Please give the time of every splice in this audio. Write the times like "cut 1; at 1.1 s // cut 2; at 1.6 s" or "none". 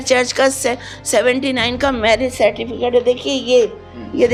none